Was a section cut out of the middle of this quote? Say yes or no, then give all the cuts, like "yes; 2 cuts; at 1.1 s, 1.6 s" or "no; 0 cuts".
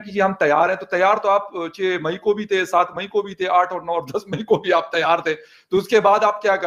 no; 0 cuts